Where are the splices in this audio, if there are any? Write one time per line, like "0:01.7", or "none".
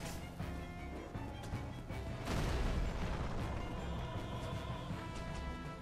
none